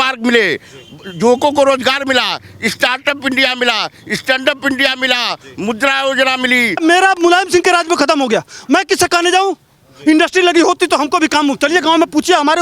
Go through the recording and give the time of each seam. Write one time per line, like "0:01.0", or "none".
0:06.8